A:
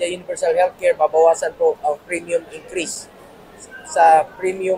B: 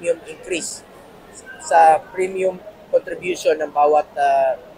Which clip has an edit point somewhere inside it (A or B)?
A